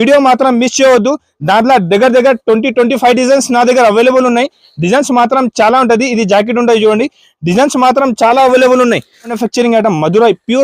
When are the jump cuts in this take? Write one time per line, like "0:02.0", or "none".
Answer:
0:09.4